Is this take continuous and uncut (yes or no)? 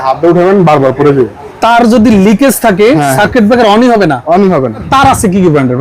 no